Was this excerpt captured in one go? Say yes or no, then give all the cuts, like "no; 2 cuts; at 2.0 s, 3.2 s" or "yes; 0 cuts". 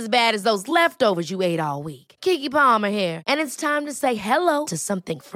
yes; 0 cuts